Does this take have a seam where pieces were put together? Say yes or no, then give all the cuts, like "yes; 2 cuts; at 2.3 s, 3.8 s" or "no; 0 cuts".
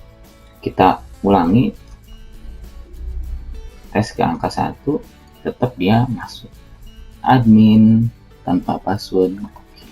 yes; 1 cut; at 7.1 s